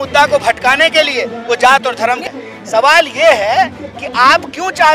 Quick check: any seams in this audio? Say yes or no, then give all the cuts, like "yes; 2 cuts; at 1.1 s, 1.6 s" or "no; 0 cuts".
yes; 1 cut; at 2.3 s